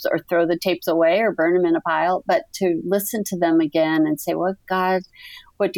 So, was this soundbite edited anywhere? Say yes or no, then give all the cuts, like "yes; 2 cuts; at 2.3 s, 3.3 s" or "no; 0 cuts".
no; 0 cuts